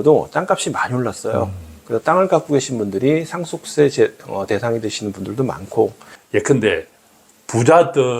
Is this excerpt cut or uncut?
cut